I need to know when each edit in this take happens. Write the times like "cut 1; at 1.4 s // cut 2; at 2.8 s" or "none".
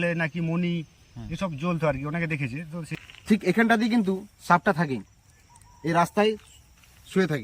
cut 1; at 2.9 s